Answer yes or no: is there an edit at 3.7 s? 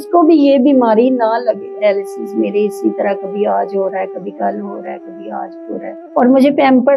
no